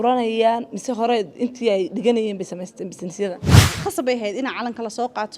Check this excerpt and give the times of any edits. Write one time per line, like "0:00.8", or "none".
0:03.7